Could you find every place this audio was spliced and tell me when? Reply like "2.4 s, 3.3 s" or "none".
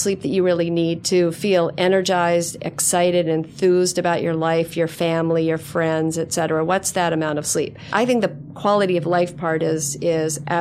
1.0 s, 7.9 s